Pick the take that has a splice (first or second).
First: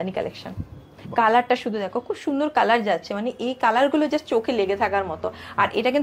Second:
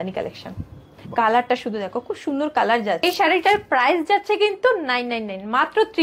second